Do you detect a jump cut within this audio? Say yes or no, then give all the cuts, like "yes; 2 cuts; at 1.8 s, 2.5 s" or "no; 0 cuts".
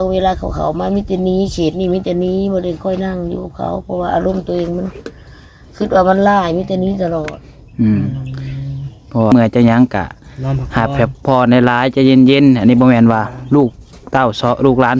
yes; 1 cut; at 9.3 s